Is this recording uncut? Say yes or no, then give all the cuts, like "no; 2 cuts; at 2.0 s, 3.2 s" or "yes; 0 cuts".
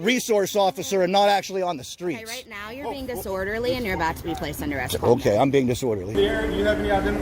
no; 1 cut; at 6.1 s